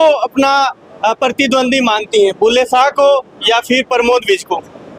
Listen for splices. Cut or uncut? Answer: uncut